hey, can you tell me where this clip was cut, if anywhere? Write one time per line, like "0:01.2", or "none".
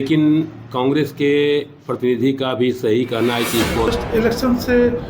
0:03.9